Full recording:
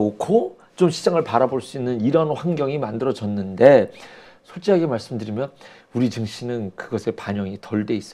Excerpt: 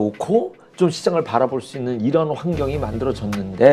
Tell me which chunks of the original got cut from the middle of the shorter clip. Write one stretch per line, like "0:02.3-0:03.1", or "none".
none

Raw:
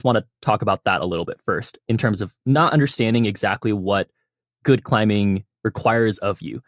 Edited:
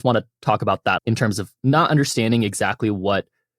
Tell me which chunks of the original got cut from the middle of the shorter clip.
0:01.0-0:01.8

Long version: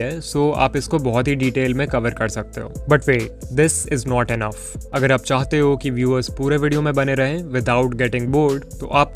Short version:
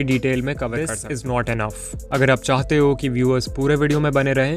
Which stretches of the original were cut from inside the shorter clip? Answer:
0:02.4-0:03.8

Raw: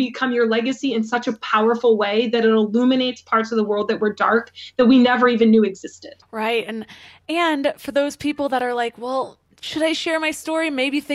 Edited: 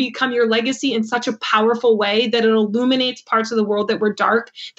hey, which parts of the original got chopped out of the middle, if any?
none

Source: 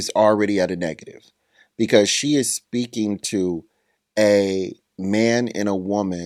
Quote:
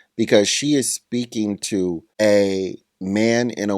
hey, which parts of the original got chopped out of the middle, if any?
0:03.7-0:04.0

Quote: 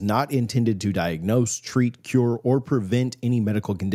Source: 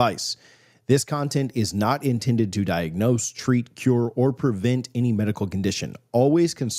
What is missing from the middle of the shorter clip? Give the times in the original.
none

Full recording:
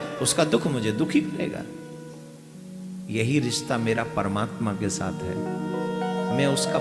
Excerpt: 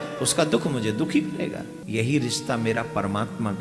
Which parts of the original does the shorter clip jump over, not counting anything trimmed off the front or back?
0:01.8-0:03.0

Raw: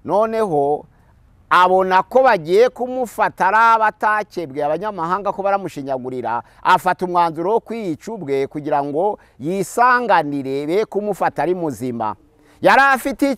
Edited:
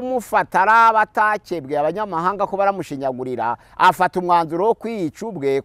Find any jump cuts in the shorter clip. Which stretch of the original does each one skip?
none

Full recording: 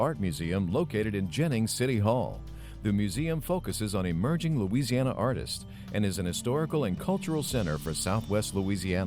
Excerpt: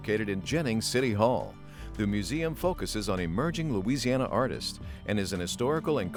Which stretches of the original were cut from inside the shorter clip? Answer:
none

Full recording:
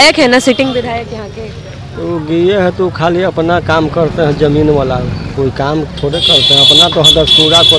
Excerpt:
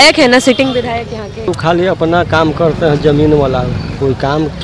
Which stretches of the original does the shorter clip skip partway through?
0:01.5-0:02.9

